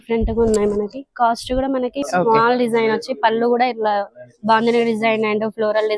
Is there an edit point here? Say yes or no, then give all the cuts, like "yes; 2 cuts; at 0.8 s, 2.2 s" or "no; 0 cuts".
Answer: yes; 1 cut; at 2.0 s